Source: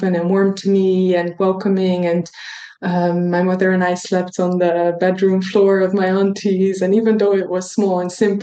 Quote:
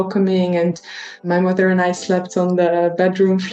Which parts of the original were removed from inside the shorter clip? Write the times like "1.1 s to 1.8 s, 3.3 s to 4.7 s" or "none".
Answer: 2.7 s to 3.3 s